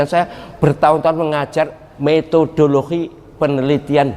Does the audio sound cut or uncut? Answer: cut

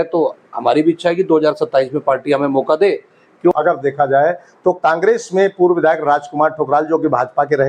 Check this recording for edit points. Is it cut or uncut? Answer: cut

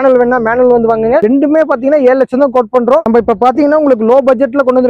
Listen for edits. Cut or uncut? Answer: cut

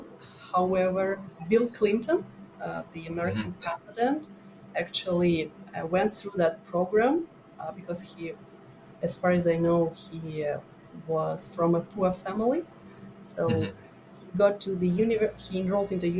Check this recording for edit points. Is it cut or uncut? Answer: cut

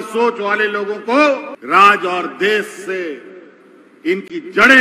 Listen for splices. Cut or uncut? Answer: cut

